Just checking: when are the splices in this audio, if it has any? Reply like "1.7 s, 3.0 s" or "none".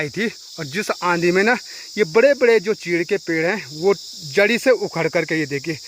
none